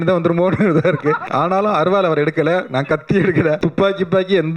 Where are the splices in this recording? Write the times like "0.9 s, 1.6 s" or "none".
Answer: 1.2 s, 3.6 s